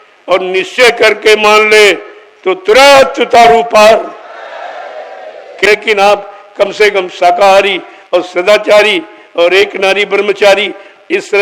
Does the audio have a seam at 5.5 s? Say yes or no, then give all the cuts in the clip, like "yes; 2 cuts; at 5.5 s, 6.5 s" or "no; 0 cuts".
yes; 1 cut; at 5.5 s